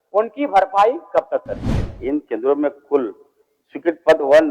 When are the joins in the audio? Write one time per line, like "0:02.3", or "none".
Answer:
0:01.9